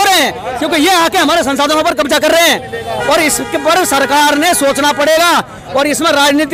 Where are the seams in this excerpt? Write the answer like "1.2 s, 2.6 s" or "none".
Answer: none